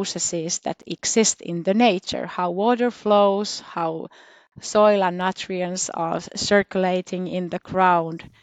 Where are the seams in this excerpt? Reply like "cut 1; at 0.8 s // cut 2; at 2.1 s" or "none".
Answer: none